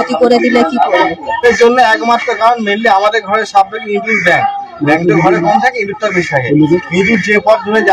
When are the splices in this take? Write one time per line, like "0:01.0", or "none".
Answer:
0:01.4